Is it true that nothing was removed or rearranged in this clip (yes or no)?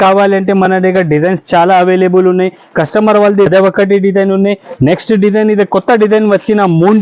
no